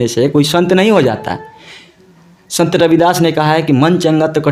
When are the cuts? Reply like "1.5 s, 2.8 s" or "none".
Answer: none